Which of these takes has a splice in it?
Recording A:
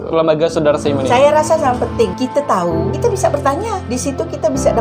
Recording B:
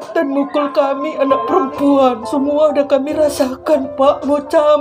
A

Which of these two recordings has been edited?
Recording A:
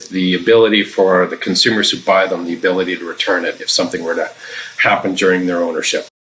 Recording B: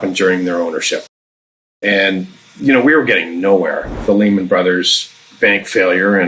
B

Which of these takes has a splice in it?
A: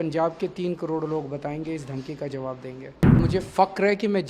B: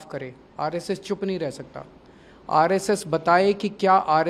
A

